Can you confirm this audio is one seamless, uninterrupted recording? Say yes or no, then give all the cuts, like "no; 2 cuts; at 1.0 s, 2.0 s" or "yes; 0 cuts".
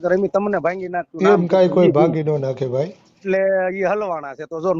no; 1 cut; at 3.2 s